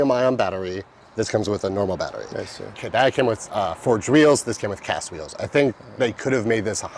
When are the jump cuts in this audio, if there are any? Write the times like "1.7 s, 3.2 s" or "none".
none